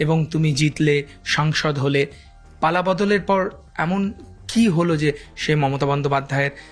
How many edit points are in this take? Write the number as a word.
zero